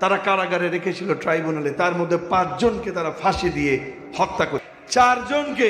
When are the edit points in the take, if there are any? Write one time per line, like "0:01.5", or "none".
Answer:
0:04.8